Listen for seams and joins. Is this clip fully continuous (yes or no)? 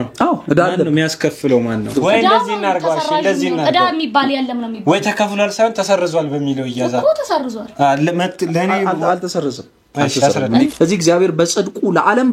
no